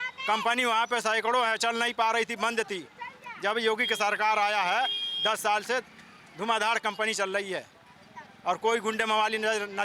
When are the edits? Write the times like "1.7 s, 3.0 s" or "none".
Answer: none